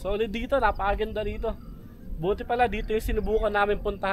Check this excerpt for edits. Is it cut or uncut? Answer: uncut